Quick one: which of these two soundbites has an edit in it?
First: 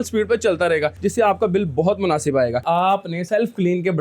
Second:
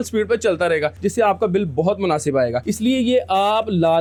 first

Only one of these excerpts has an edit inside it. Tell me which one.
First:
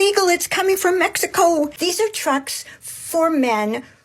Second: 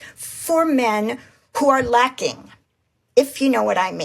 first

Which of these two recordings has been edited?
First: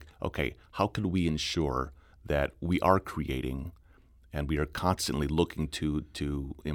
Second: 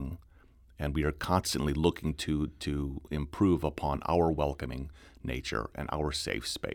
first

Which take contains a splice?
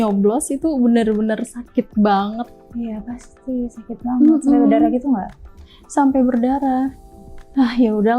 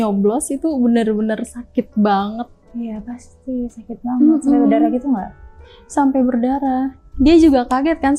first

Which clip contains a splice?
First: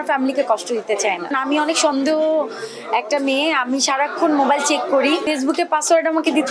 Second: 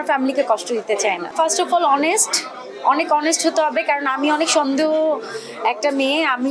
first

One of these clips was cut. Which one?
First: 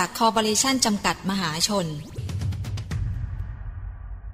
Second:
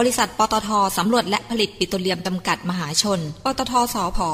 first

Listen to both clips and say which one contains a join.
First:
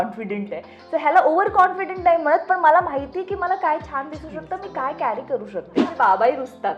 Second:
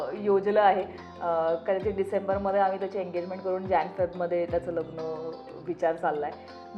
first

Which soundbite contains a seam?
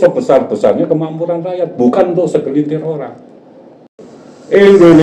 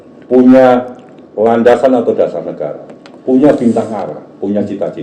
first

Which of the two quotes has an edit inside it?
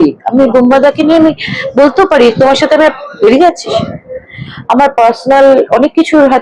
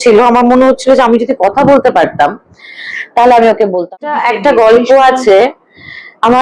second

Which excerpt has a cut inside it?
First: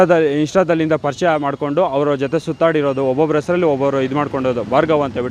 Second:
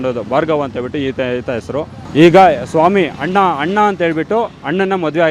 second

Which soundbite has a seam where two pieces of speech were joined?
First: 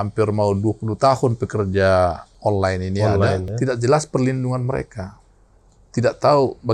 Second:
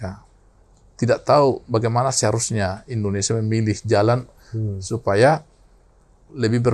first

